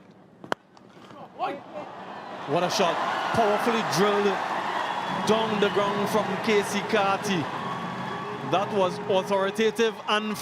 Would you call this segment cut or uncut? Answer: uncut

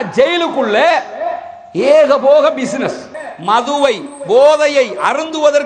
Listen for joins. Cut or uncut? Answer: cut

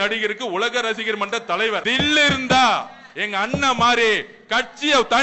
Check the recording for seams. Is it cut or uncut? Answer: cut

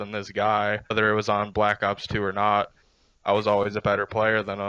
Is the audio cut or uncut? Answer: cut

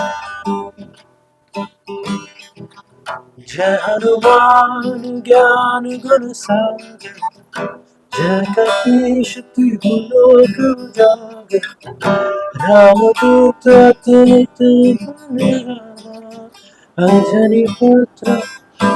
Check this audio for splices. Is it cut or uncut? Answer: uncut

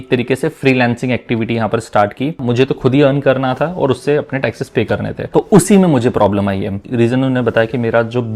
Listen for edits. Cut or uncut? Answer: cut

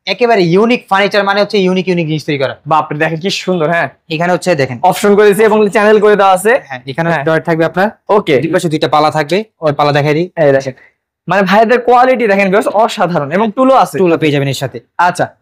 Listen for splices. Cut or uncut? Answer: uncut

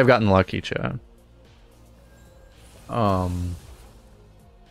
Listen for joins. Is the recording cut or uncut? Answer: uncut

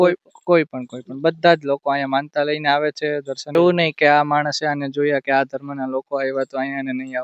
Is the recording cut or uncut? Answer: cut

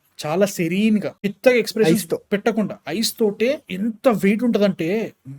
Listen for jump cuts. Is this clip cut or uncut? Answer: uncut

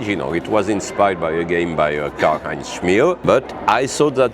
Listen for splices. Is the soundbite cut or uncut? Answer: cut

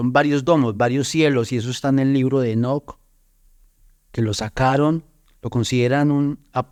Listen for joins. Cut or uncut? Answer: uncut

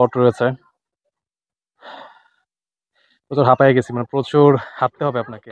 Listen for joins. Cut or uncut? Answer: uncut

